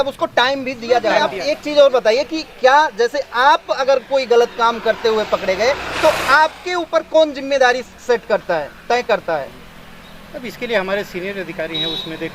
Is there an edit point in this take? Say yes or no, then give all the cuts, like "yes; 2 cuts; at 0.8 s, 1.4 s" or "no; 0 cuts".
yes; 1 cut; at 1.3 s